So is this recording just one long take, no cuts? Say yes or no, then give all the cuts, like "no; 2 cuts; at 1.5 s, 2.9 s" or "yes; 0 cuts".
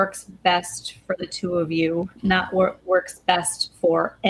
yes; 0 cuts